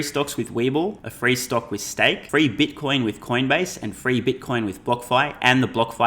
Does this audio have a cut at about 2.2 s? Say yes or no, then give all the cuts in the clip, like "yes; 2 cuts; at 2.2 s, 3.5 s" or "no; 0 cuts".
yes; 2 cuts; at 1.1 s, 2.2 s